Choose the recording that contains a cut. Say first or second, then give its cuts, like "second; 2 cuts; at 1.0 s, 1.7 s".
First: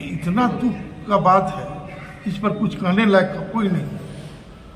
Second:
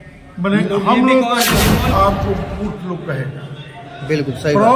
second; 1 cut; at 1.9 s